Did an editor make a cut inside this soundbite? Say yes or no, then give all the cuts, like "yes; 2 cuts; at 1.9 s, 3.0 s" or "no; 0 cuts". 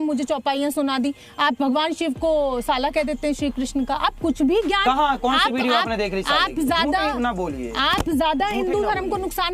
no; 0 cuts